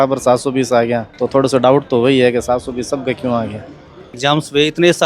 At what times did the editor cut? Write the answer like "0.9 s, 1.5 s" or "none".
1.1 s, 4.2 s